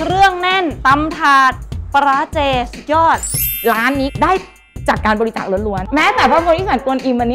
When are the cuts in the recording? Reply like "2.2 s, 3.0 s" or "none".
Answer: none